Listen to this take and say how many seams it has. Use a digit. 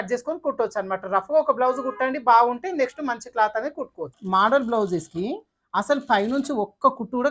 1